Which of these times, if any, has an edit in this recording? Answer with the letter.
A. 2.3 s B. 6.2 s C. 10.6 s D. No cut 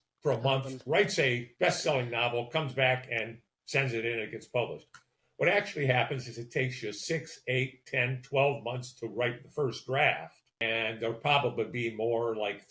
C